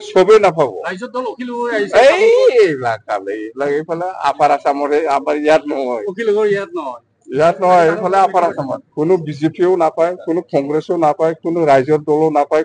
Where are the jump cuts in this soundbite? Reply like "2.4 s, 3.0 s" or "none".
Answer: 8.8 s